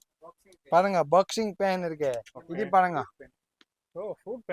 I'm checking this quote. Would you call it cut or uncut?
cut